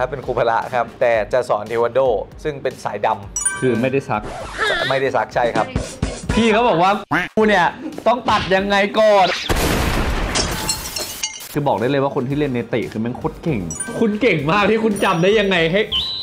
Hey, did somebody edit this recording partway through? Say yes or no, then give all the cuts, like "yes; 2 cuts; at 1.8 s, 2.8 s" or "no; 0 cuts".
yes; 3 cuts; at 0.9 s, 9.3 s, 11.5 s